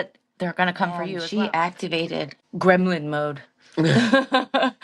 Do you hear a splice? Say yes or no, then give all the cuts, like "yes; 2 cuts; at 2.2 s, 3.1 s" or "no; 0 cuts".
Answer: yes; 2 cuts; at 1.2 s, 2.4 s